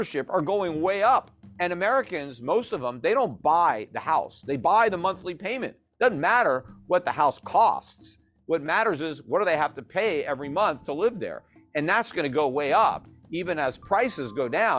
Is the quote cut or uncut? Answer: cut